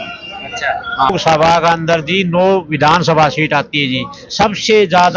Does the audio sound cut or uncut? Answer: cut